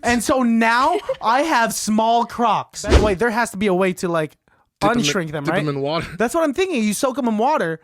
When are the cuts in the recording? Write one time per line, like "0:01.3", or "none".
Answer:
0:03.0